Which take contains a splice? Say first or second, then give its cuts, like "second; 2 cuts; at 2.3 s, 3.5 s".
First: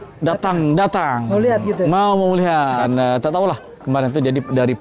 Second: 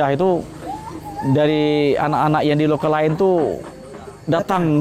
first; 1 cut; at 2.8 s